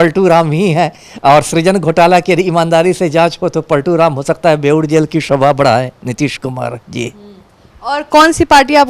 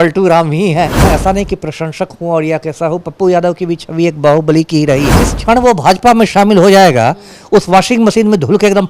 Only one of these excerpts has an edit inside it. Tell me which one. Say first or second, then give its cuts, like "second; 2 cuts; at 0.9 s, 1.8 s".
second; 2 cuts; at 1.0 s, 5.3 s